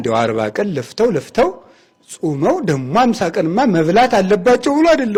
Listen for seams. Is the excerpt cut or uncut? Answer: uncut